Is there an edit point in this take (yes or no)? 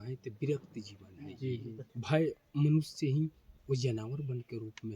yes